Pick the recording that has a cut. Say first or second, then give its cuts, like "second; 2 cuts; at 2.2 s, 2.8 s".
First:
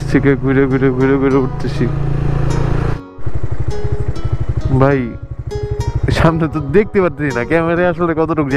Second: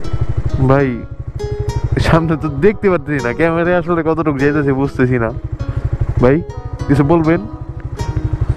first; 1 cut; at 3.0 s